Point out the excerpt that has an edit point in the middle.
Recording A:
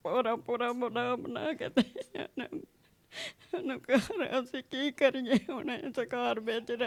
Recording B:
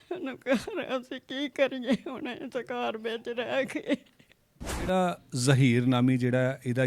B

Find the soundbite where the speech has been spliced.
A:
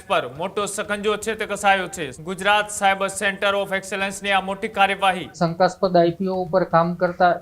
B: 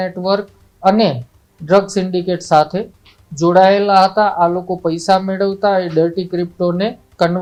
A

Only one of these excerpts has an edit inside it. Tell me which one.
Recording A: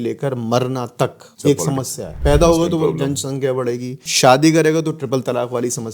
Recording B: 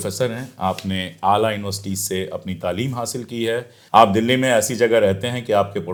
A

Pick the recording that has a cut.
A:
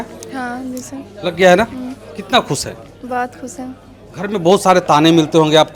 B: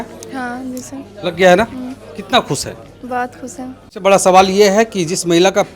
B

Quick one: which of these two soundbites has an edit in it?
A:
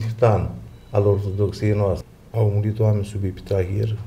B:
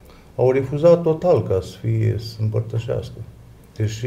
A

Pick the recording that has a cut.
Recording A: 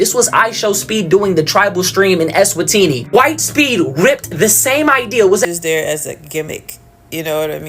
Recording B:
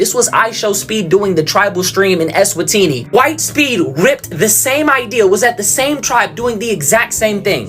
A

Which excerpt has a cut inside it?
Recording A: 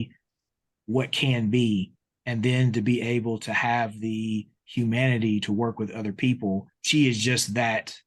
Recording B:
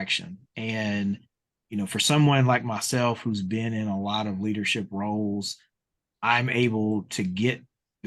A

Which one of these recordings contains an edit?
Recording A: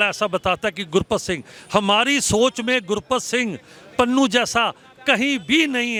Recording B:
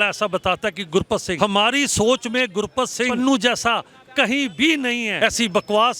B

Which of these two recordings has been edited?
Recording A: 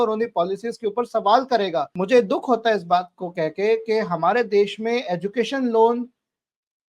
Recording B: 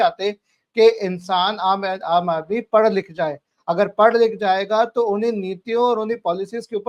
A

